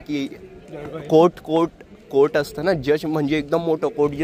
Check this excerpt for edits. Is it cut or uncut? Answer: uncut